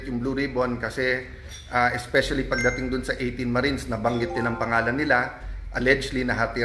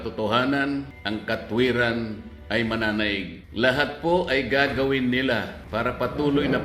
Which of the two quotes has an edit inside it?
second; 3 cuts; at 1.0 s, 3.4 s, 5.6 s

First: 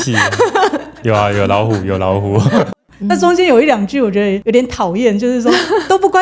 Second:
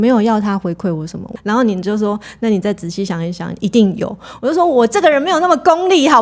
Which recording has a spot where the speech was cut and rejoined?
first; 3 cuts; at 0.9 s, 2.7 s, 4.4 s

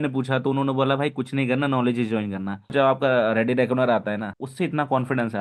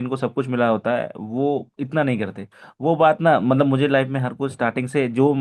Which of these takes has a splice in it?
first; 2 cuts; at 2.7 s, 4.4 s

